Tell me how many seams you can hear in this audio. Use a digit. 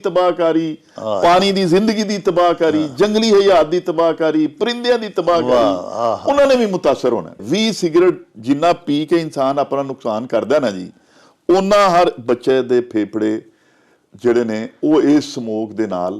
1